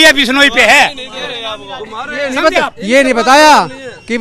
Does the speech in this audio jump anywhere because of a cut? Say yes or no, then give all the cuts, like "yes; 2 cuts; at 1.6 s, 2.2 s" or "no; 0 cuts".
no; 0 cuts